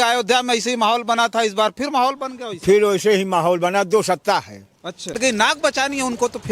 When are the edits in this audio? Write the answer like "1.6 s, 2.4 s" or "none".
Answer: 5.2 s